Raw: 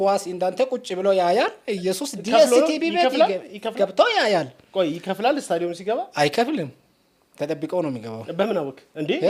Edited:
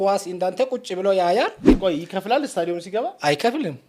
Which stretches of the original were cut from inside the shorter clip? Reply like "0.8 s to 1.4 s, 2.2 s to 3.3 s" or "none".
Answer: 1.7 s to 4.6 s